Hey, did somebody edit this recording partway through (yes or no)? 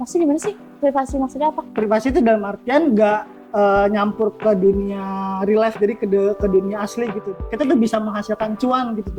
yes